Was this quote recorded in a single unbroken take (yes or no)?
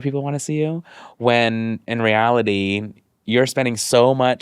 no